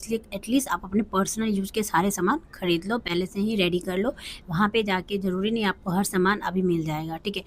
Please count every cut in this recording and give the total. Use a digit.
0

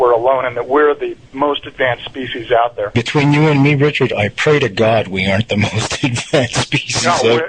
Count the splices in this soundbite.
1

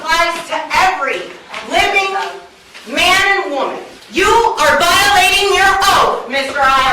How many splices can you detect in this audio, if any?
1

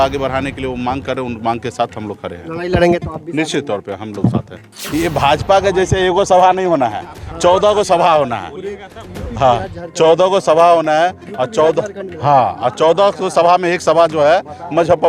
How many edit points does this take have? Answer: 1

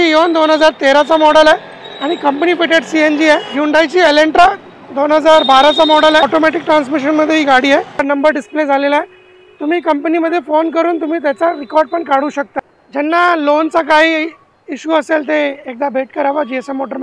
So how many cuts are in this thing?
4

